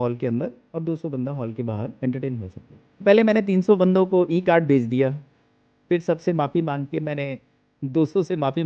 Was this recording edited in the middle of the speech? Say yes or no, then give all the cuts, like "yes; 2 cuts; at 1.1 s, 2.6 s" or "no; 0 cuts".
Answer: yes; 1 cut; at 3.0 s